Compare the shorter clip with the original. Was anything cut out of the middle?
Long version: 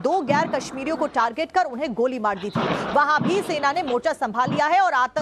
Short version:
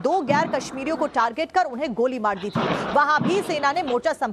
no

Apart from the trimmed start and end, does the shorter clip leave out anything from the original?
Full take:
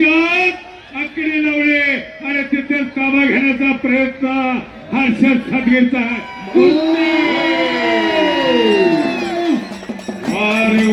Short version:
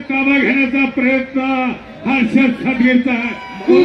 no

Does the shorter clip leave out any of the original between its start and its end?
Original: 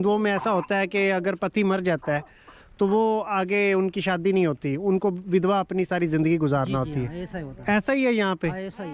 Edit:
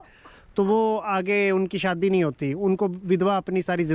no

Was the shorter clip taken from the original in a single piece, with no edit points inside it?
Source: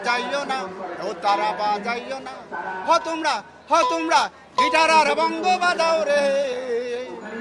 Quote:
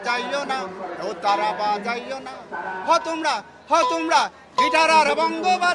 yes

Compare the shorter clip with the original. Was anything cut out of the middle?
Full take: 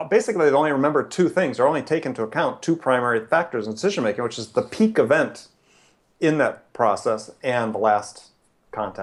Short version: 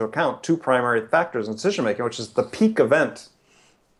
no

